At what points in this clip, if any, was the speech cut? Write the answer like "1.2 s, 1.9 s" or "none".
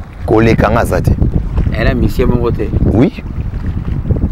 1.4 s